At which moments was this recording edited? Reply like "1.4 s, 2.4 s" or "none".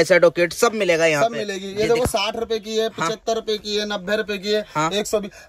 none